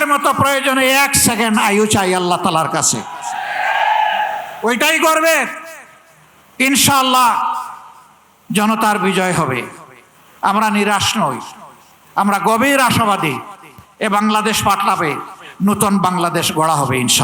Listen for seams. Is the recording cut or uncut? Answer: uncut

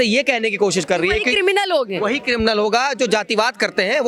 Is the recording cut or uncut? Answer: uncut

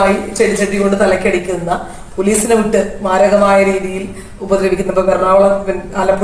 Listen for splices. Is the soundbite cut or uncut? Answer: uncut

